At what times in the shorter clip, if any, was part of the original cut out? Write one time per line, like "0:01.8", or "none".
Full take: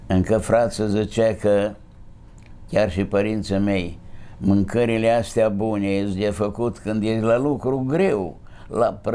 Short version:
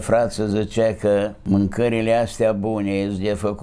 0:01.4